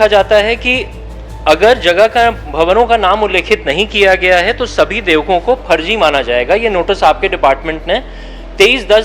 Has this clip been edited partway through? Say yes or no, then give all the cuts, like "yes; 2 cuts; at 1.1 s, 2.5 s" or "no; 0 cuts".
no; 0 cuts